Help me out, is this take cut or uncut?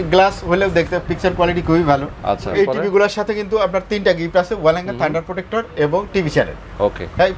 cut